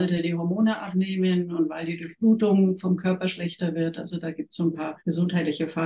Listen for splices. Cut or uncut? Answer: cut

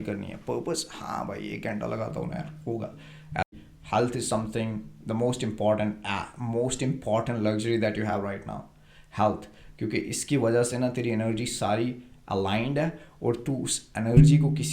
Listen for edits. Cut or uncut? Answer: cut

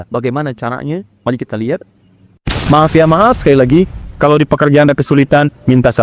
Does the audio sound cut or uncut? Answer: cut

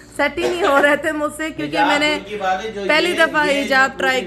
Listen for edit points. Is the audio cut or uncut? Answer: uncut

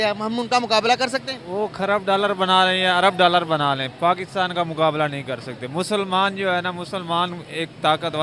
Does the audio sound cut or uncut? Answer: uncut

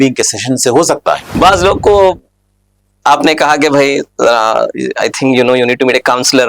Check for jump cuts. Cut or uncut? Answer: cut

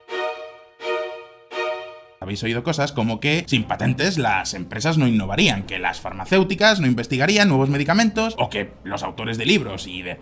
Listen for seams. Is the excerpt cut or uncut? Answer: cut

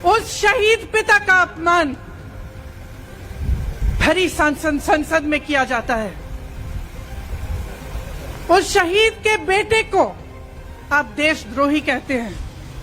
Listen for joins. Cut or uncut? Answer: uncut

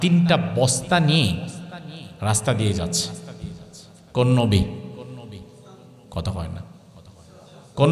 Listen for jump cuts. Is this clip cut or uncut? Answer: uncut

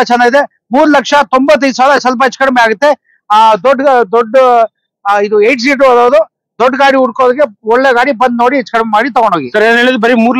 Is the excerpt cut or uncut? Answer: uncut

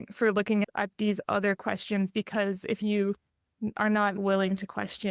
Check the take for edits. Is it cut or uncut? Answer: cut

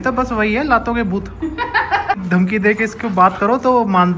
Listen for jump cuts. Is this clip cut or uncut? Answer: cut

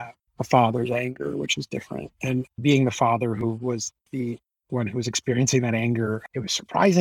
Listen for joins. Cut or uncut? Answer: uncut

